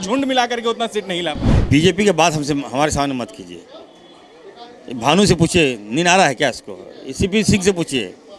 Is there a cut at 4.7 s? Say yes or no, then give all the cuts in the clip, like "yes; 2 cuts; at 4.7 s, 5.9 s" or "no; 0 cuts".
no; 1 cut; at 1.5 s